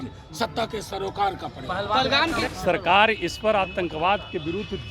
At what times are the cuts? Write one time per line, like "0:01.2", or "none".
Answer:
0:02.5